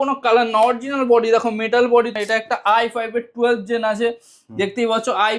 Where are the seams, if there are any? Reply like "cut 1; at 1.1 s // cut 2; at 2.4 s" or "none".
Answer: cut 1; at 2.1 s